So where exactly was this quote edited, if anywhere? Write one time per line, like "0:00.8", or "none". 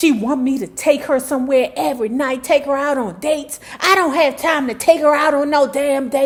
none